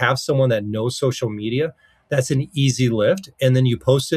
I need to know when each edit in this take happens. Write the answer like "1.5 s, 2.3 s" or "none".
none